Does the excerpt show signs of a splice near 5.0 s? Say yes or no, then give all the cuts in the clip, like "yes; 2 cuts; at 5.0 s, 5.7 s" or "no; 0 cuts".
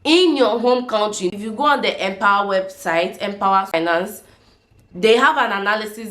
no; 2 cuts; at 1.3 s, 3.7 s